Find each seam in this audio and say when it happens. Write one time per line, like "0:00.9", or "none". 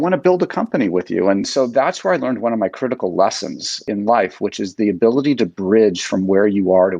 0:01.5